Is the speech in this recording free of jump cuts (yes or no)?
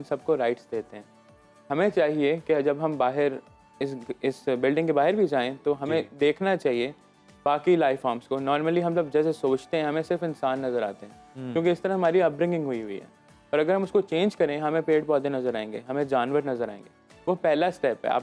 yes